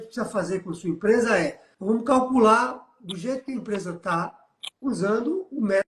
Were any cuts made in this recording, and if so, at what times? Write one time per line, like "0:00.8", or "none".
0:01.7